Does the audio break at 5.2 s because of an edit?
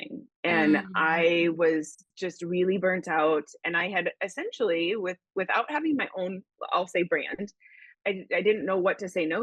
no; 1 cut; at 7.9 s

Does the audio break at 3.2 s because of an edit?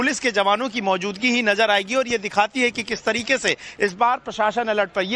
yes; 1 cut; at 3.2 s

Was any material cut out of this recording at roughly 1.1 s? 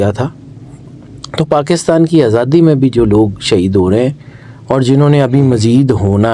no; 0 cuts

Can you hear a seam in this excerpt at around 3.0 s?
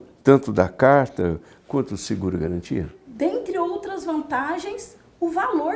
yes; 1 cut; at 3.0 s

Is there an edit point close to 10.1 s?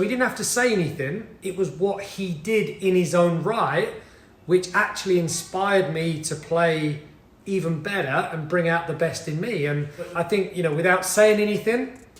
yes; 1 cut; at 10.1 s

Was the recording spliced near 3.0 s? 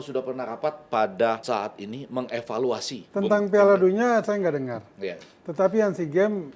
yes; 1 cut; at 3.0 s

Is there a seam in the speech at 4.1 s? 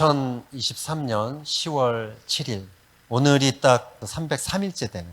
yes; 1 cut; at 4.1 s

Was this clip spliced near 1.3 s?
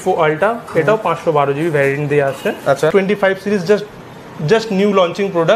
no; 1 cut; at 2.9 s

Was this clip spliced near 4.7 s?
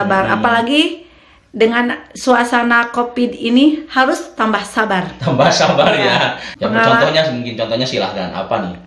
no; 1 cut; at 6.4 s

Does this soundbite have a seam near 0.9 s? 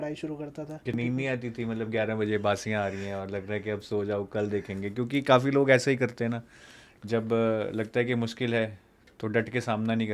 yes; 1 cut; at 0.9 s

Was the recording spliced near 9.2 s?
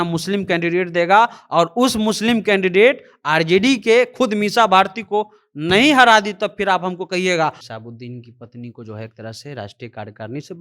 no; 1 cut; at 7.6 s

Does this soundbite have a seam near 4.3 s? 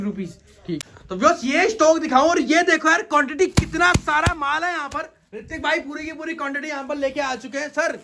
no; 1 cut; at 1.0 s

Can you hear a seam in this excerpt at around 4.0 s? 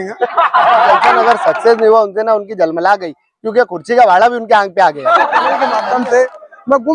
no; 2 cuts; at 1.1 s, 5.6 s

